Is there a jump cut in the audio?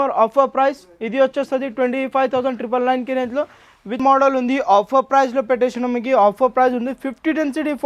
yes; 1 cut; at 4.0 s

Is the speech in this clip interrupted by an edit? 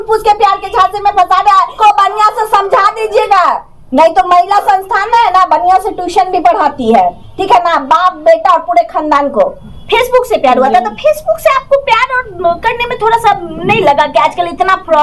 yes; 2 cuts; at 1.7 s, 9.6 s

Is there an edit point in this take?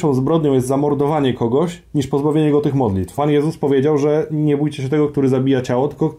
yes; 1 cut; at 3.2 s

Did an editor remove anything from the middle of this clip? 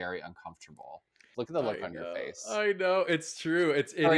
yes; 1 cut; at 1.3 s

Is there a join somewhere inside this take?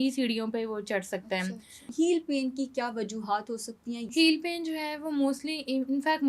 yes; 2 cuts; at 1.9 s, 4.1 s

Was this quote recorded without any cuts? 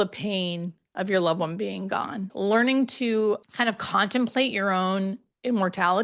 no; 2 cuts; at 2.3 s, 3.4 s

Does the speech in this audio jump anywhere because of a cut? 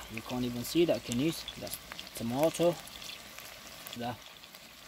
yes; 1 cut; at 4.0 s

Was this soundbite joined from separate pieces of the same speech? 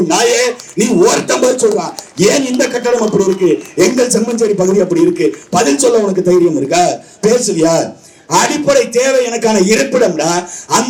no; 0 cuts

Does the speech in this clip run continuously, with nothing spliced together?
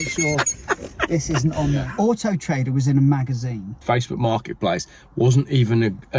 no; 2 cuts; at 1.9 s, 3.8 s

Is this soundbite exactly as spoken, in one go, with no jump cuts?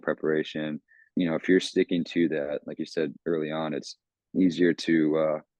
no; 1 cut; at 1.0 s

